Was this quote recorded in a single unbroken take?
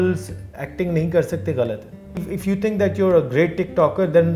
no; 1 cut; at 2.1 s

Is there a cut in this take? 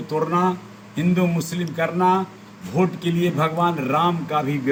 no; 0 cuts

